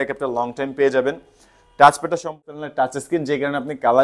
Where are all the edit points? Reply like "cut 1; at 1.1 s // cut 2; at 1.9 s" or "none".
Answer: cut 1; at 2.4 s